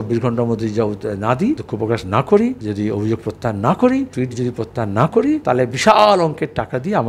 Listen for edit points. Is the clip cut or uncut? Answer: cut